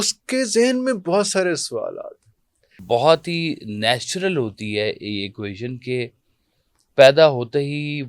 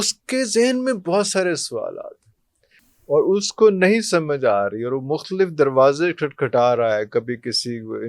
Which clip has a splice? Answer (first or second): first